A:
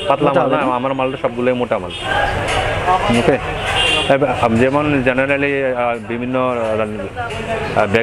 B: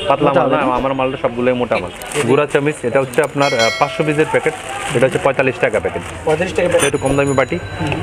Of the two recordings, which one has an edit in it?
B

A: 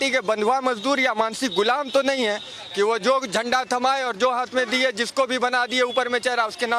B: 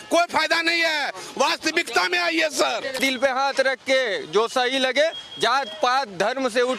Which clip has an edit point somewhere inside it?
B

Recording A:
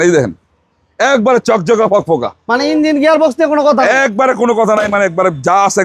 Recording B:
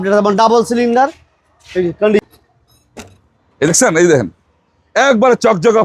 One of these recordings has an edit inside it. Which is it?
B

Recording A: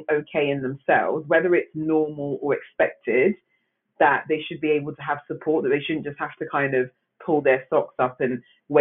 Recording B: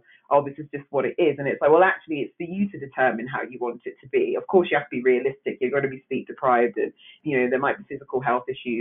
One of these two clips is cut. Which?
B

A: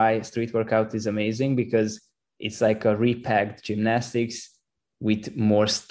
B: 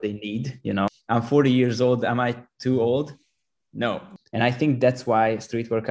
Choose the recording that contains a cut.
B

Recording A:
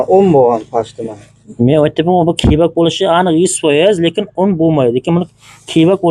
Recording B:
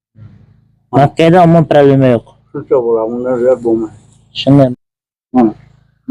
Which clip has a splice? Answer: B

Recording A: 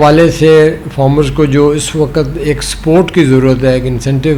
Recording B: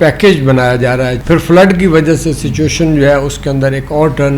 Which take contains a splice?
B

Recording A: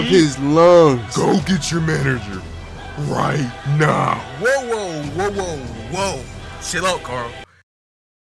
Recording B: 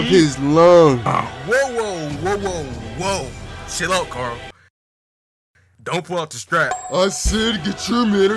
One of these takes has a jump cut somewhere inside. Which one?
B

